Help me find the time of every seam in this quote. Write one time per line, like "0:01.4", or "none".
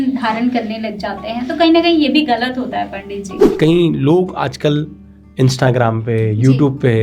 0:03.5